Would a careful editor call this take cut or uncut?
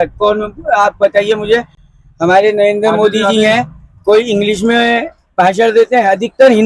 uncut